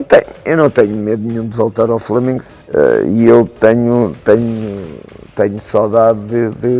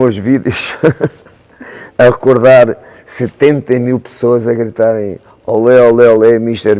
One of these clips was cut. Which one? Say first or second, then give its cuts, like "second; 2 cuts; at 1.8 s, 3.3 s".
first; 1 cut; at 2.5 s